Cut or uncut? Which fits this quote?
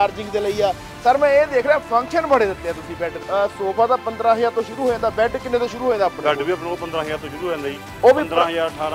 cut